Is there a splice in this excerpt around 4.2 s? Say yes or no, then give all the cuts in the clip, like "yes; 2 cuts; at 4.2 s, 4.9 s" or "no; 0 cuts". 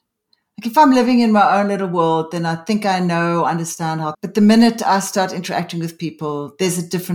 yes; 1 cut; at 4.2 s